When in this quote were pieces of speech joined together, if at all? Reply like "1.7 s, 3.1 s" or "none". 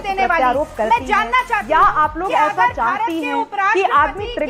none